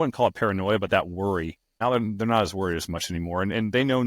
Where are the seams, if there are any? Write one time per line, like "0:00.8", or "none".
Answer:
0:01.7